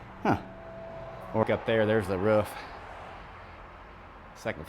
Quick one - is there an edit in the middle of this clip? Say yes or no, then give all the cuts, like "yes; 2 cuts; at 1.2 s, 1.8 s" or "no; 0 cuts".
yes; 1 cut; at 1.4 s